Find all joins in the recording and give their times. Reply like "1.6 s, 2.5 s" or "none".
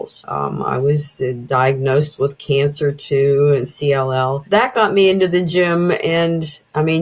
4.4 s